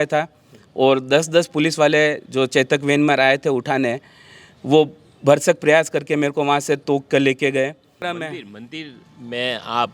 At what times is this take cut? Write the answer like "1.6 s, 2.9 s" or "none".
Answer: 8.0 s